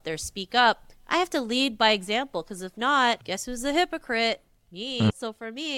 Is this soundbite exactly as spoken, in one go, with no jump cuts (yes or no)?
no